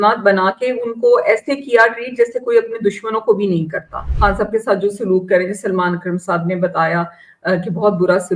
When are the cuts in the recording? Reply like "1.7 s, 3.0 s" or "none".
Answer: 4.0 s